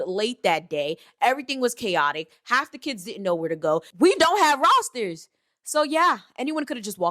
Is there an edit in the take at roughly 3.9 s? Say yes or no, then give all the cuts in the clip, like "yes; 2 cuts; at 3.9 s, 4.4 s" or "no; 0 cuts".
yes; 1 cut; at 3.9 s